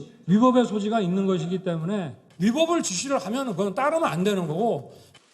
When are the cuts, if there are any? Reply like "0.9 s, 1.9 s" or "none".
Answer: 1.8 s